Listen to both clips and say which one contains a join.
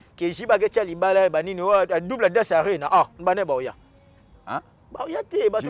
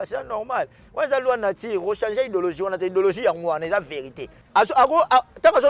second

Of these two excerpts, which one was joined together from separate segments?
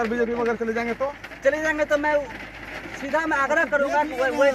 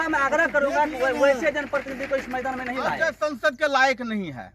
second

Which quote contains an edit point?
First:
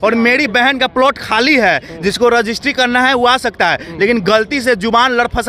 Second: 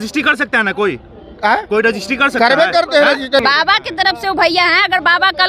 second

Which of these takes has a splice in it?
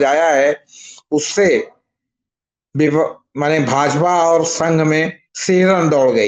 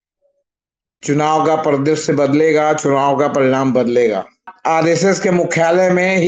second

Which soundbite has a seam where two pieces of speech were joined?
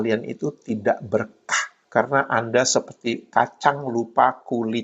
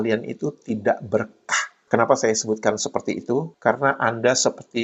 first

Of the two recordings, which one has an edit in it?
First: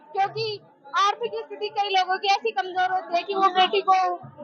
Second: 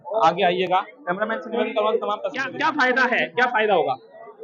second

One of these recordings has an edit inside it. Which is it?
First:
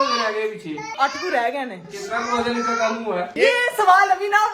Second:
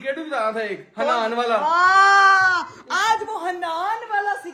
first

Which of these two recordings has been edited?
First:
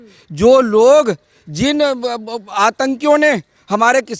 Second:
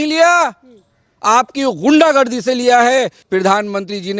second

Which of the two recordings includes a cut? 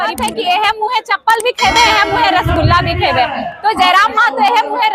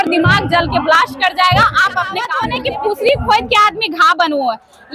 second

